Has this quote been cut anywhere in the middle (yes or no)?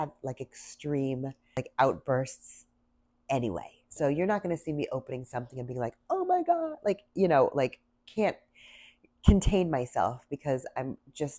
yes